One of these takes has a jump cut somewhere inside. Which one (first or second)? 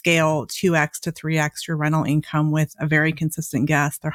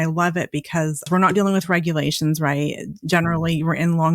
second